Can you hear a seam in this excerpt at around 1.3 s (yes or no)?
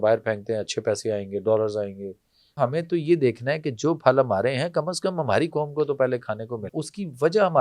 no